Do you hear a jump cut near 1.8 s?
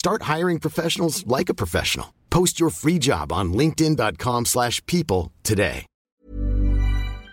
no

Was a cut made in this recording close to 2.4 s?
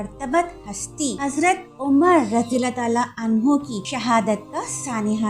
no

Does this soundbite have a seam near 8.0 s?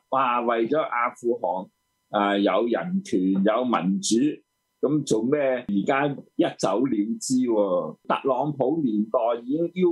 yes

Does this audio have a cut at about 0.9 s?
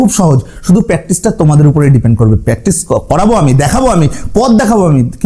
no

